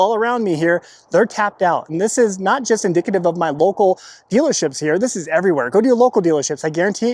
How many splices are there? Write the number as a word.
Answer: zero